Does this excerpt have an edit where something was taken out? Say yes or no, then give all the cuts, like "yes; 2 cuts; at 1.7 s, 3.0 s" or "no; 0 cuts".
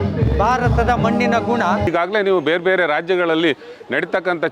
yes; 1 cut; at 1.9 s